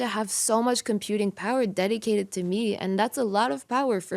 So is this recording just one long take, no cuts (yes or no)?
yes